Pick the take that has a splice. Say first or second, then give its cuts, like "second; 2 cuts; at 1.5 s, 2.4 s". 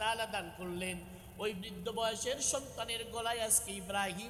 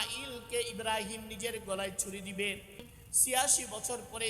second; 1 cut; at 3.0 s